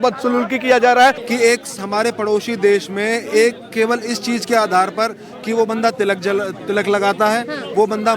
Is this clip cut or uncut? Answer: cut